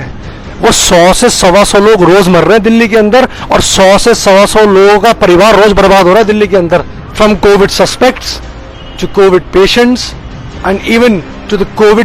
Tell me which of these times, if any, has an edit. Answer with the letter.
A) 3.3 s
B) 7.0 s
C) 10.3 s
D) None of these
B